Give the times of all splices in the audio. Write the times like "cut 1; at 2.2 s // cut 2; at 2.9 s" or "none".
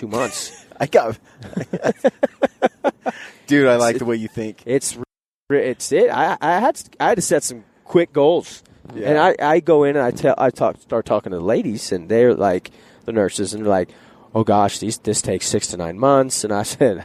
none